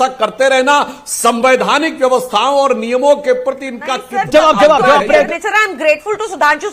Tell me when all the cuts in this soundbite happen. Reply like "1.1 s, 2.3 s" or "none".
5.3 s